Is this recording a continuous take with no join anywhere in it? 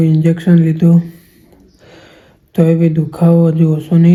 yes; 0 cuts

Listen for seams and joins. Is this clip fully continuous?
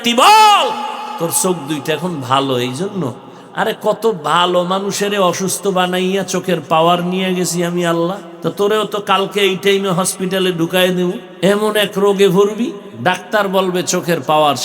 no; 4 cuts; at 1.1 s, 8.3 s, 11.3 s, 12.9 s

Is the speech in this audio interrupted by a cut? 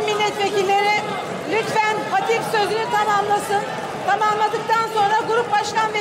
no; 0 cuts

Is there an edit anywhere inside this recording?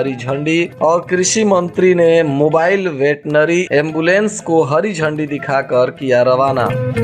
no; 0 cuts

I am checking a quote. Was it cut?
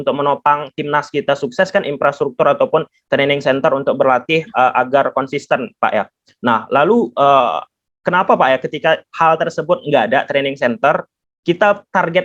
no; 0 cuts

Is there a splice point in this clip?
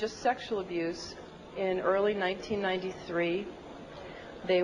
yes; 1 cut; at 1.0 s

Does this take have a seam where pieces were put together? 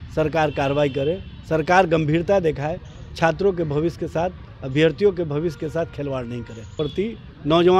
yes; 1 cut; at 6.7 s

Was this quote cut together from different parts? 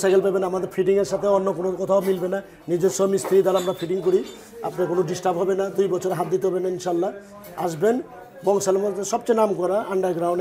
no; 0 cuts

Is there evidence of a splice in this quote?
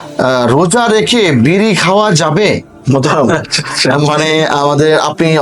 yes; 1 cut; at 2.7 s

